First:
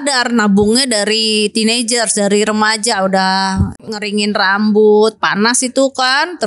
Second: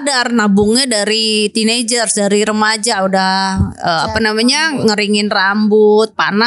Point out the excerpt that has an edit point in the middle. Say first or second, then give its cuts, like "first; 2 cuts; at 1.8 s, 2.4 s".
first; 1 cut; at 3.9 s